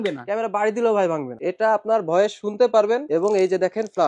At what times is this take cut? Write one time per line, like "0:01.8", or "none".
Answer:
0:01.3
0:03.0